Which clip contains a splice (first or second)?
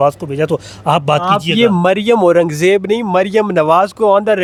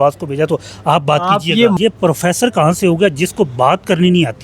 second